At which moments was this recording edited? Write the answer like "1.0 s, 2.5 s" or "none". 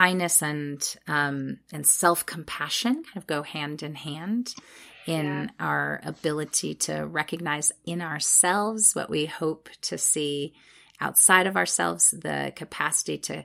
none